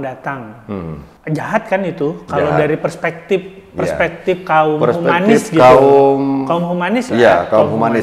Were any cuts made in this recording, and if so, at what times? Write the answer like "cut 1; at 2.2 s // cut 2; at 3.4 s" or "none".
cut 1; at 1.1 s